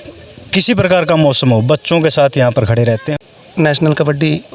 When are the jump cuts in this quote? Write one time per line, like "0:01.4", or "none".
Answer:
0:03.1